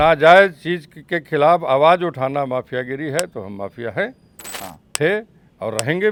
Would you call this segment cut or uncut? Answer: uncut